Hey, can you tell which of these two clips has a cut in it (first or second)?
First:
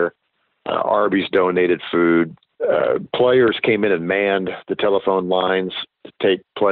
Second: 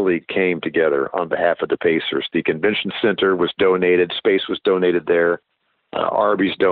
first